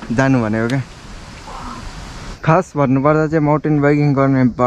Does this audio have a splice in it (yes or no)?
yes